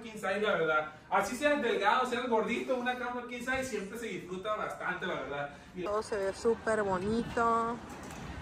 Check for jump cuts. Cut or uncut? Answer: cut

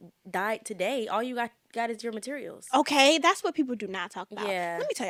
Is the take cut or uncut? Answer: uncut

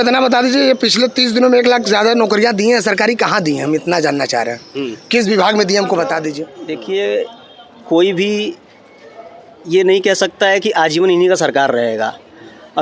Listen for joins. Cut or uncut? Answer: cut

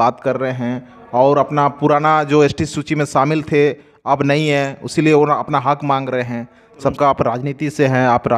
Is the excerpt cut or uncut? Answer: cut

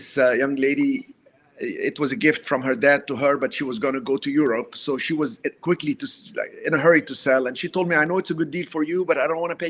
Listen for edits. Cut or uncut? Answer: uncut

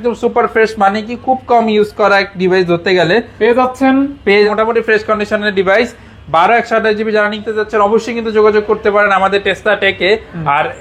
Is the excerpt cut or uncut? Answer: cut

